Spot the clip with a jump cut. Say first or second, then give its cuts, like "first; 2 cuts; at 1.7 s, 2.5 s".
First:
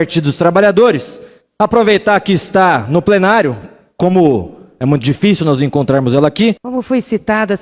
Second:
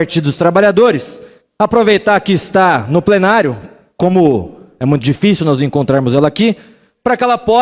first; 1 cut; at 6.6 s